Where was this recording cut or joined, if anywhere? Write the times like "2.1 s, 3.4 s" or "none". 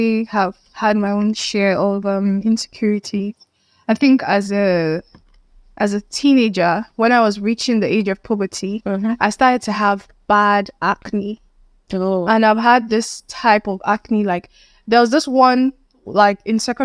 none